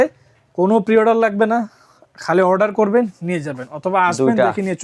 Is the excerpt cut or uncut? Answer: uncut